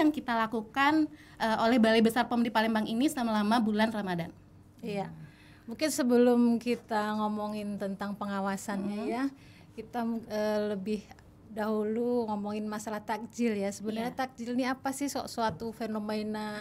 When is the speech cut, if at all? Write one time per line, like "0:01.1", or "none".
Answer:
none